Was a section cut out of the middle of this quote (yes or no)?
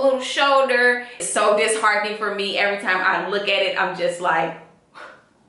yes